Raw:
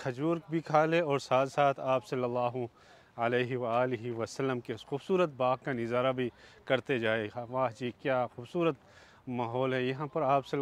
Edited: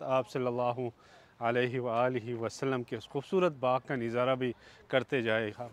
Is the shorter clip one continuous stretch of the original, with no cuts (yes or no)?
yes